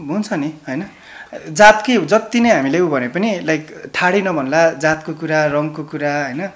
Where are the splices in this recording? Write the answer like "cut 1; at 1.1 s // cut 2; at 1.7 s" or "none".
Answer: none